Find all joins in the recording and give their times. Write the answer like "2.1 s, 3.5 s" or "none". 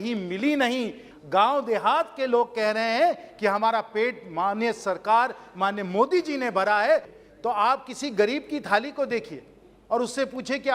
1.1 s, 7.1 s